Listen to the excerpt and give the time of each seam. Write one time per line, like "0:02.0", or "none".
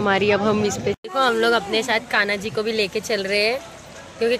0:01.0

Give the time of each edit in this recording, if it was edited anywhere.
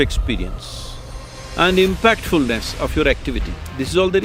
none

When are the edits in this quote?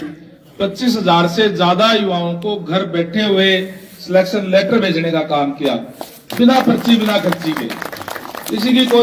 none

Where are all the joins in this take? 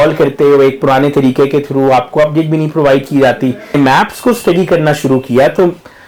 0:03.8

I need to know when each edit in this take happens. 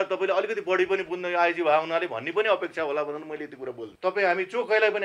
0:03.8

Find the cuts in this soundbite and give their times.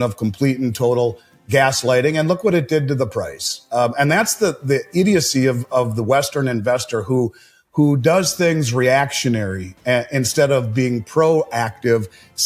none

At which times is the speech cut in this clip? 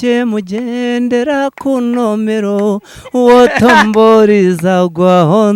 none

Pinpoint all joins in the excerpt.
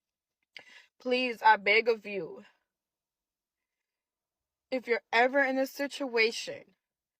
none

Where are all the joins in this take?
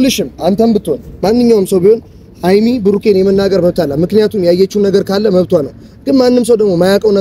none

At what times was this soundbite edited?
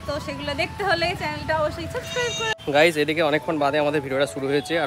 0:02.6

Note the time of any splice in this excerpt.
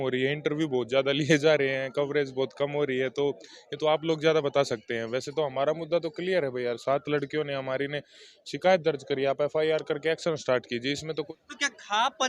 0:11.3

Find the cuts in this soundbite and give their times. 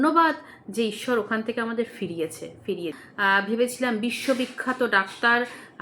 0:03.0

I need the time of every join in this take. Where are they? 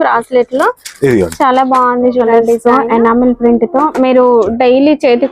0:02.6

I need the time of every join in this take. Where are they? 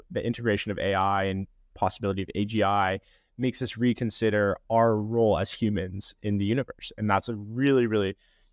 none

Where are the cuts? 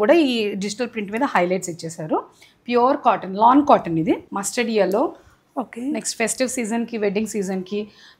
0:04.4

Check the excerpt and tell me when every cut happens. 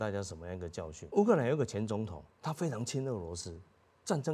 0:00.9

